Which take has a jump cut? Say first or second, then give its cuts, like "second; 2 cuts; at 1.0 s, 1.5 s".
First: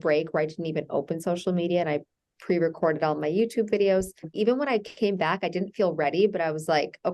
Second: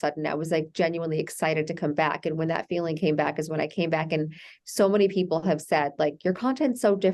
first; 1 cut; at 4.3 s